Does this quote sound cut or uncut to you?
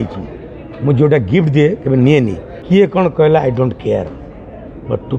cut